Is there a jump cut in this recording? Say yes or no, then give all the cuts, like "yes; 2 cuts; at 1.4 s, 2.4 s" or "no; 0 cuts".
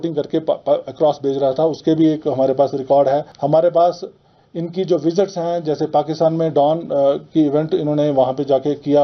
yes; 1 cut; at 3.3 s